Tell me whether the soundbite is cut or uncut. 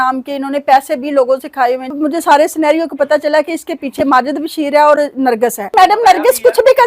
cut